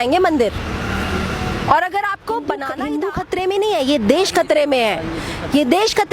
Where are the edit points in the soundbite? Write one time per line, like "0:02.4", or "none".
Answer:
0:02.7